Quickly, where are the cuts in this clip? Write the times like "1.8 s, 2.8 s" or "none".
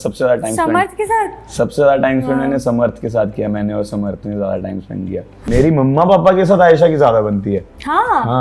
5.3 s